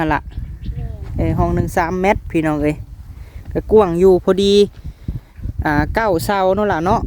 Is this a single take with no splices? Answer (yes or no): yes